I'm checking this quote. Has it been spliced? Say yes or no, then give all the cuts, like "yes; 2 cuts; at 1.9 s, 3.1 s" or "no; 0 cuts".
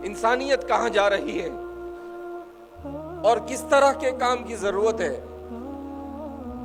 no; 0 cuts